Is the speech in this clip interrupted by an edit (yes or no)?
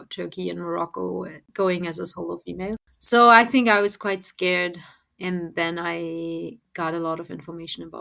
yes